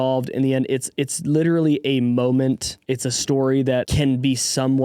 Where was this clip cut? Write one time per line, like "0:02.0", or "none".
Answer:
0:02.7
0:03.9